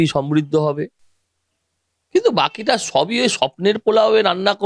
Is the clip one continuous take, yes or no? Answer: yes